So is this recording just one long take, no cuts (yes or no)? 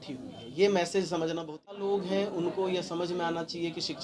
no